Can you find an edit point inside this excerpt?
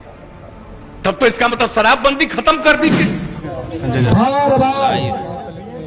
yes; 1 cut; at 3.5 s

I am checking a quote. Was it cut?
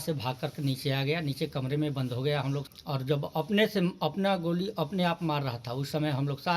yes; 1 cut; at 2.6 s

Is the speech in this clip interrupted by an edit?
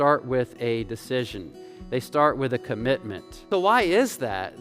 yes; 1 cut; at 3.4 s

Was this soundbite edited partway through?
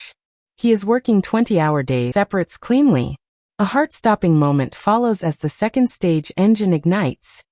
yes; 1 cut; at 2.1 s

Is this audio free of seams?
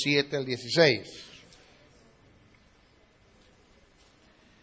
yes; 0 cuts

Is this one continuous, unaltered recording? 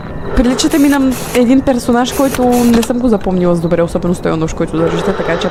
yes; 0 cuts

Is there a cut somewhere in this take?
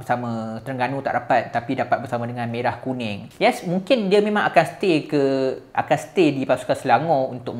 yes; 1 cut; at 3.2 s

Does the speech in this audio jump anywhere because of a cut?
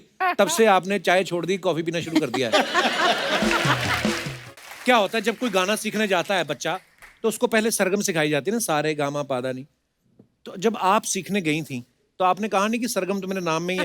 yes; 1 cut; at 4.3 s

